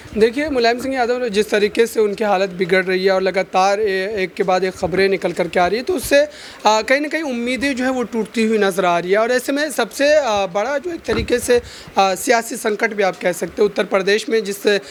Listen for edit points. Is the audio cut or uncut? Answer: uncut